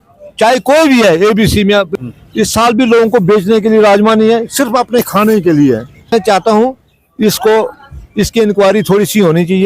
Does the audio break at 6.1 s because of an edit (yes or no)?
yes